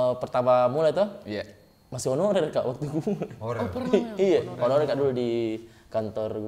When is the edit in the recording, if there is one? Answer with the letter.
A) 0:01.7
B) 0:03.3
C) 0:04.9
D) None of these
D